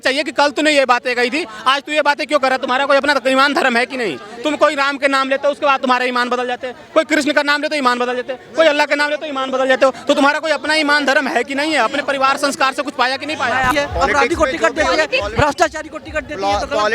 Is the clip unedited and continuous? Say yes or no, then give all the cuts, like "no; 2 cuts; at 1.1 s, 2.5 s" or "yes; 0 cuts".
no; 1 cut; at 13.7 s